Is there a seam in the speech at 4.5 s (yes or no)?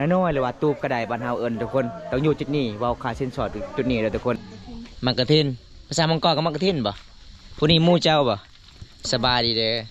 yes